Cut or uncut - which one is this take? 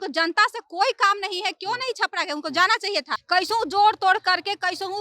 cut